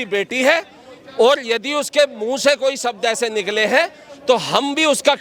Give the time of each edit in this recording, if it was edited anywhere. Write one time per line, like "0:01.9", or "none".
none